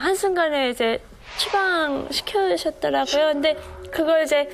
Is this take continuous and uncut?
yes; 0 cuts

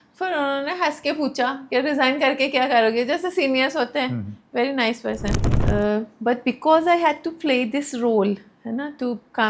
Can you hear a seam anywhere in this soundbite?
yes; 1 cut; at 5.5 s

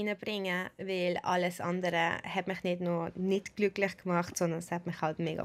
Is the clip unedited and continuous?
yes; 0 cuts

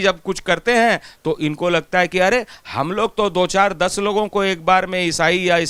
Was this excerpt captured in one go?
yes; 0 cuts

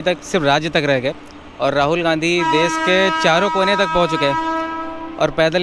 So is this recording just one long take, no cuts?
yes; 0 cuts

